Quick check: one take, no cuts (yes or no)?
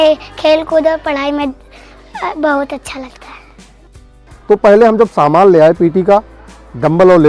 yes